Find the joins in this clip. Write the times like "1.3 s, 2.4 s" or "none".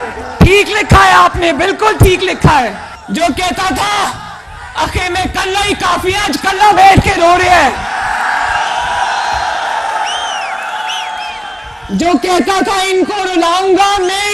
2.9 s

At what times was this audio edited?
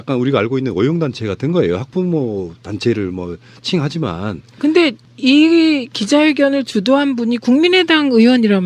none

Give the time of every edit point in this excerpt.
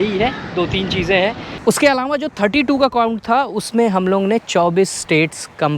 1.5 s

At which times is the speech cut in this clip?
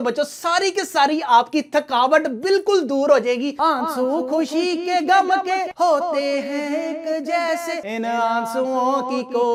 none

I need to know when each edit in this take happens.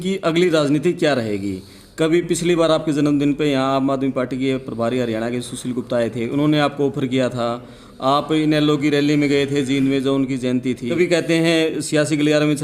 10.9 s

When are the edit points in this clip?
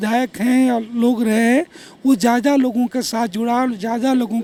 none

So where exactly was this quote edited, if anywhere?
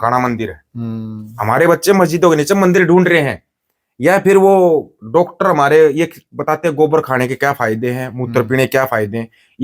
none

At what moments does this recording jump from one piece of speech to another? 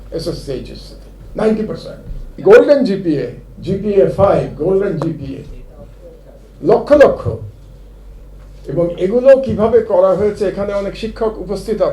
2.4 s

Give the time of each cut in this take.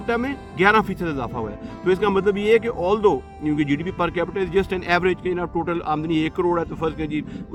none

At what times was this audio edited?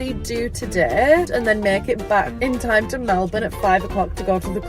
1.3 s, 2.3 s

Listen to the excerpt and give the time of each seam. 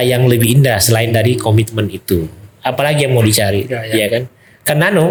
none

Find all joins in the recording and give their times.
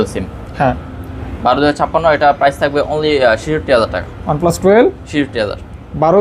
none

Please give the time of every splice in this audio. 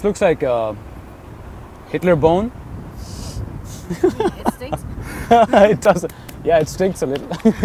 none

